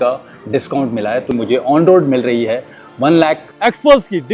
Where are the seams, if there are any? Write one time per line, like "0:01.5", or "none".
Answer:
0:01.3
0:03.5